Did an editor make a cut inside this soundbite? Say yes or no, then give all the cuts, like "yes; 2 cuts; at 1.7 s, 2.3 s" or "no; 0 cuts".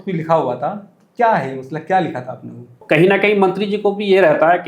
yes; 1 cut; at 2.8 s